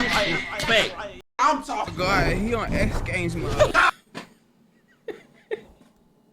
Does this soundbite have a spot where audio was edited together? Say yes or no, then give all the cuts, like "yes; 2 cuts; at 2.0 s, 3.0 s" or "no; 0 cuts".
yes; 1 cut; at 1.5 s